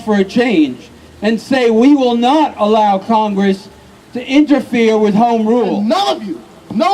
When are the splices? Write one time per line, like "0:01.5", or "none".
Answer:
0:05.8